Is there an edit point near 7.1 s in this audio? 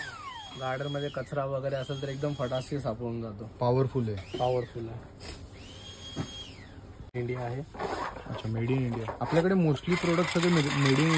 yes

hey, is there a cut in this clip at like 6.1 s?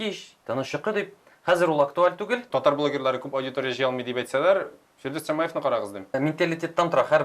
yes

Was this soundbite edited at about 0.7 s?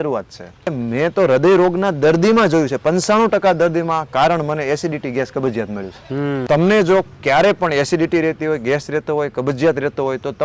yes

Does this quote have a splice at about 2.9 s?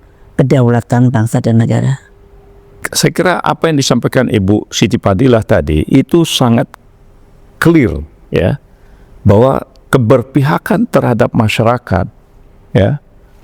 yes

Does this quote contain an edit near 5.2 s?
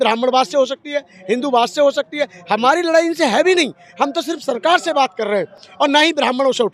no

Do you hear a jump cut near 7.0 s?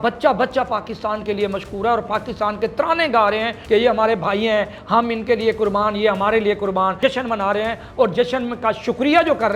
yes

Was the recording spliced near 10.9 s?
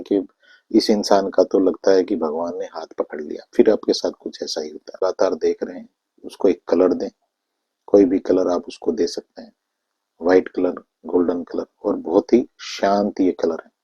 no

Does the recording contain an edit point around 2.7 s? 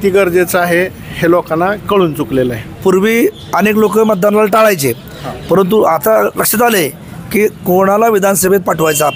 yes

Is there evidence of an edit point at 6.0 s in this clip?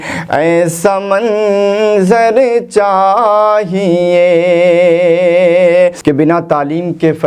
yes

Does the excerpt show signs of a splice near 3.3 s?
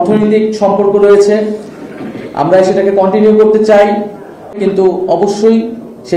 no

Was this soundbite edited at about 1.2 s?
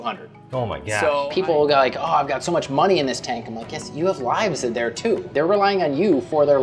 yes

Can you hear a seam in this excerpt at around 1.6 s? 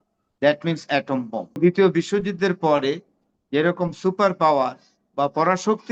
yes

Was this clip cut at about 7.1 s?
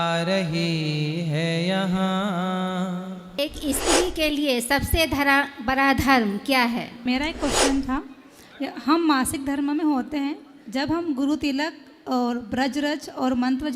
yes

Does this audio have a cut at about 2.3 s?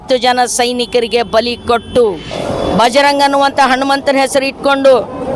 yes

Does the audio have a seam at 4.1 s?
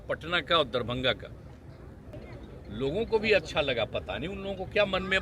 no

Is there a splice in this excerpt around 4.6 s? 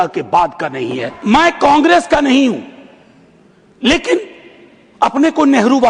no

